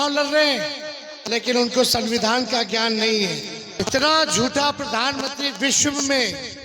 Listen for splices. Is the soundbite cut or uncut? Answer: cut